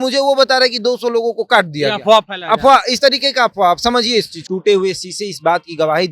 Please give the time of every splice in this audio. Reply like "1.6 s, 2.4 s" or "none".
4.4 s